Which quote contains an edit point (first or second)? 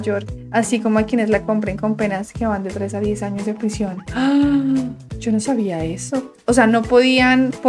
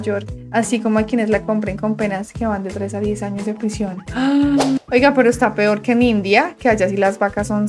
second